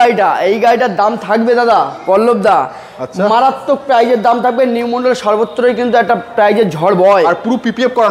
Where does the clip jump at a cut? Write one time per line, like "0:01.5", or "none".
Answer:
none